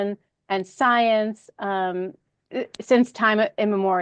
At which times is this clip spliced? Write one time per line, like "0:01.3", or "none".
none